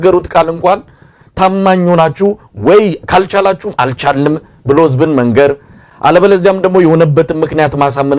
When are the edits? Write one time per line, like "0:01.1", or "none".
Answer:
none